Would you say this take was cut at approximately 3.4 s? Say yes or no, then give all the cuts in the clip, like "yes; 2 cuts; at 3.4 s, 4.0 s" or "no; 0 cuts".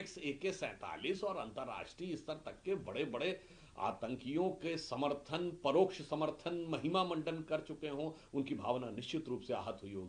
no; 0 cuts